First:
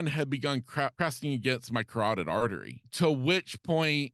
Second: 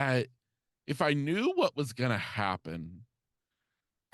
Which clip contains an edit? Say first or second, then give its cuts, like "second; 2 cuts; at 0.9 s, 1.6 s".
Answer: first; 2 cuts; at 0.9 s, 2.8 s